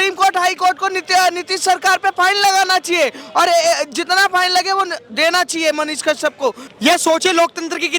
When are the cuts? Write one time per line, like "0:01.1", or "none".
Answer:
0:06.6